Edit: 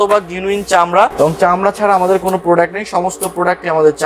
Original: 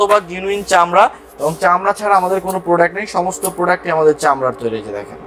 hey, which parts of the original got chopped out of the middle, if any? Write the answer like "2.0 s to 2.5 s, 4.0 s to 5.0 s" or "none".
1.1 s to 1.4 s